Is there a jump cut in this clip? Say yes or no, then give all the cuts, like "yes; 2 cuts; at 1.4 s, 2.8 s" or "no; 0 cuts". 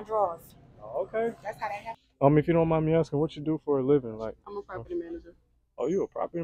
yes; 1 cut; at 2.0 s